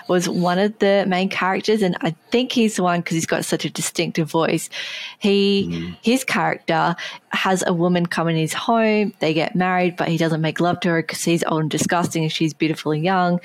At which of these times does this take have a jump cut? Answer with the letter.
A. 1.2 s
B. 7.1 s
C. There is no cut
B